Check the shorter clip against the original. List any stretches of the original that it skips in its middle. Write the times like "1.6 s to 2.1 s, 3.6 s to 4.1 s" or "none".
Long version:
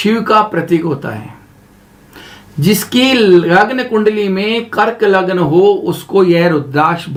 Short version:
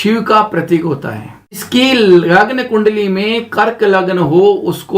1.6 s to 2.8 s